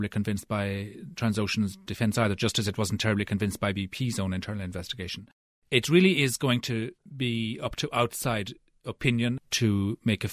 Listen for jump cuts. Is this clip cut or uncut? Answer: cut